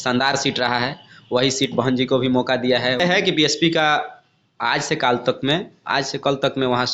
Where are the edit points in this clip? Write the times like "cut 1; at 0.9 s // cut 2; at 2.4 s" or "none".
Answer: cut 1; at 3.0 s